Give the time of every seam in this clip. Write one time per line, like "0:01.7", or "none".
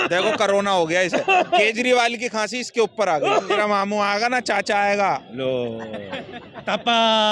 0:03.6